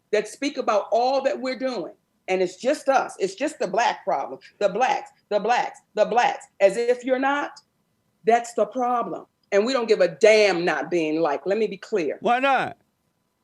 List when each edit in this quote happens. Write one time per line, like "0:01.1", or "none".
0:09.2